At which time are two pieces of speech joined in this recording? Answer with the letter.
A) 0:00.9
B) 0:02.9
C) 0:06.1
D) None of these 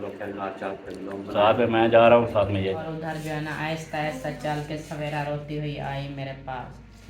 B